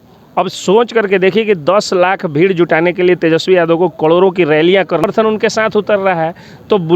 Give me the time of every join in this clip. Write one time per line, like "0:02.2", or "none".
0:05.0